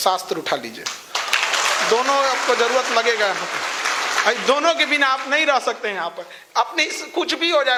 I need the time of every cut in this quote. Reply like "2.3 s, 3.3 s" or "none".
none

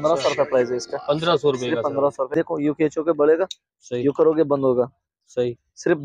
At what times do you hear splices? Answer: 2.3 s

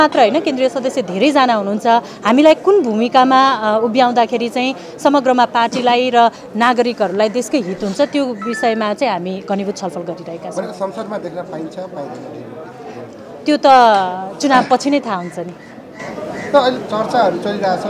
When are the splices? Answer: none

